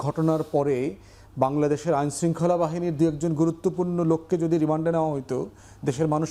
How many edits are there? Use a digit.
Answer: 0